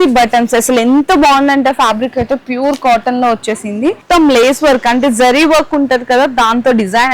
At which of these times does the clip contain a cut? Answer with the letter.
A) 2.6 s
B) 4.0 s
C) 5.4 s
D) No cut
B